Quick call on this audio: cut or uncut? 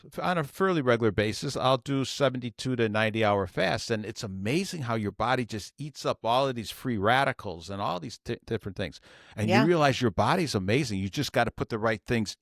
uncut